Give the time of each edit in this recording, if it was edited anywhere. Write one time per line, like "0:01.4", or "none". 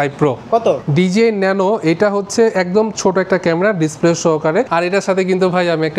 0:00.8
0:04.7